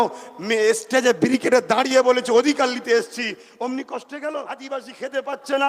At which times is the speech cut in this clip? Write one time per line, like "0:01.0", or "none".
0:04.6